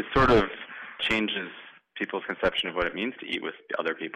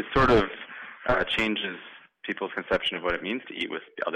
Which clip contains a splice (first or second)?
first